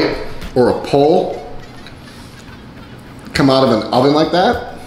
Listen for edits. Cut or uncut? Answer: uncut